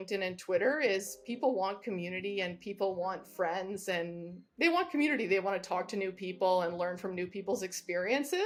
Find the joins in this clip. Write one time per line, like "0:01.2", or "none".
none